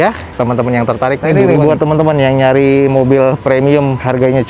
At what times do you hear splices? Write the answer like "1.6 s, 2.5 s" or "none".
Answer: 1.4 s